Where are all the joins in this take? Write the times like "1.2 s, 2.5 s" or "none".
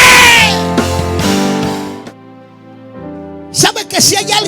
1.9 s